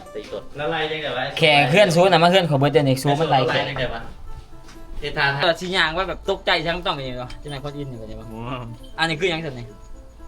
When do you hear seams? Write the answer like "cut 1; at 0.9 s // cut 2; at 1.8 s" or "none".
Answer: cut 1; at 5.4 s